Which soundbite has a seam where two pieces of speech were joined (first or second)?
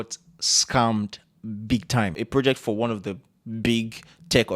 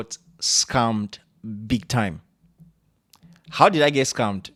first